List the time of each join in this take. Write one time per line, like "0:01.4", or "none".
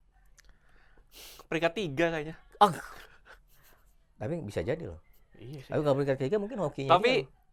none